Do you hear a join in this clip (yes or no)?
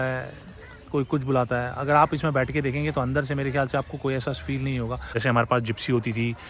yes